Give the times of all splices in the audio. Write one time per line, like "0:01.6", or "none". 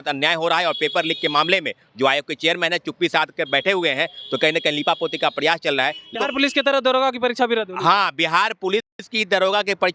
0:06.1